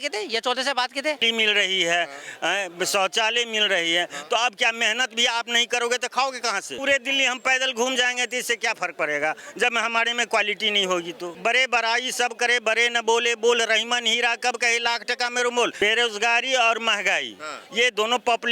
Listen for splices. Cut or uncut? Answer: cut